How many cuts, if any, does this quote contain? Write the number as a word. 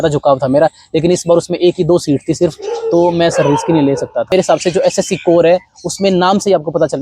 one